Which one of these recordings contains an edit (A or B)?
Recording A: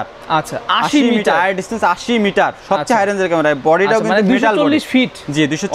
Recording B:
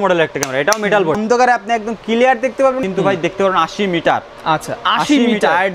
B